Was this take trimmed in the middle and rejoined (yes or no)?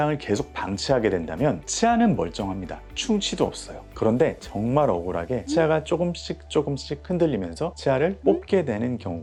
no